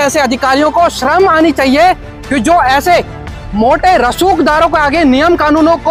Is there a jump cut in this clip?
no; 0 cuts

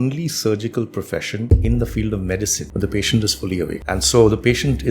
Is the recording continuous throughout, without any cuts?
no; 3 cuts; at 1.4 s, 2.6 s, 3.8 s

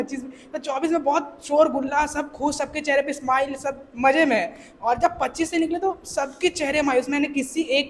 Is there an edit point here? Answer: no; 0 cuts

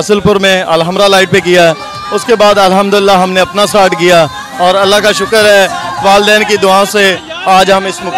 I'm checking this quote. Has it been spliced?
no; 0 cuts

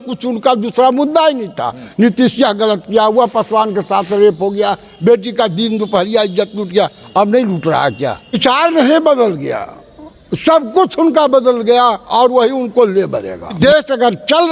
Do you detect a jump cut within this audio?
yes; 2 cuts; at 8.4 s, 13.6 s

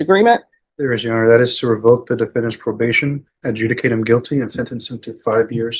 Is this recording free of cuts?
yes; 0 cuts

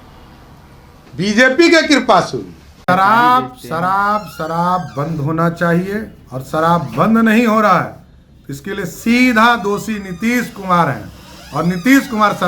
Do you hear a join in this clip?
yes; 1 cut; at 2.8 s

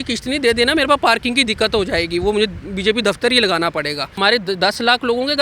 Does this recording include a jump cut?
yes; 1 cut; at 4.2 s

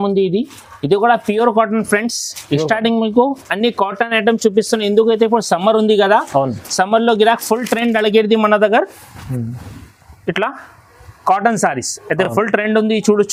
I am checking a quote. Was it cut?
no; 0 cuts

